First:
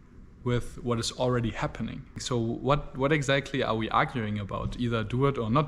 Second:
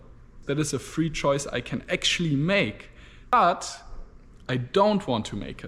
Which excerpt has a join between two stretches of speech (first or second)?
first